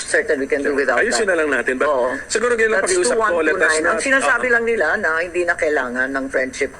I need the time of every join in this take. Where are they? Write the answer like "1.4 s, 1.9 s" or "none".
none